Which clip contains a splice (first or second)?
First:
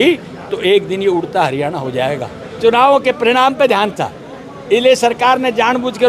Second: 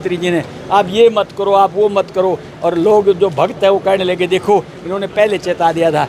first